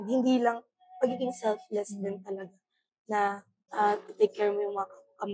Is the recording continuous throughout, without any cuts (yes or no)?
no